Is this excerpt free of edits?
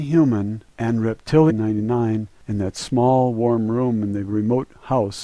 yes; 0 cuts

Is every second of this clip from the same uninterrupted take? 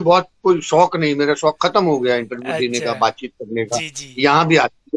yes; 0 cuts

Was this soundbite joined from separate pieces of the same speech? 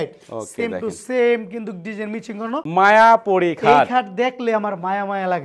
yes; 1 cut; at 2.7 s

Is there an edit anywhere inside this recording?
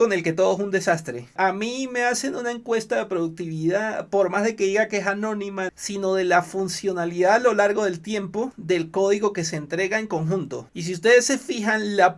yes; 4 cuts; at 1.3 s, 5.8 s, 8.6 s, 10.7 s

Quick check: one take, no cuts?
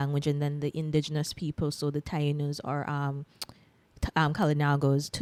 yes; 0 cuts

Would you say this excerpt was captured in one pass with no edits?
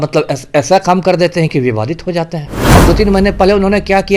no; 1 cut; at 2.5 s

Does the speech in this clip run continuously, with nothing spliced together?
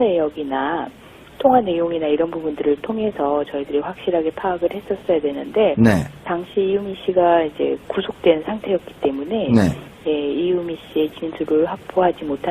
no; 1 cut; at 5.0 s

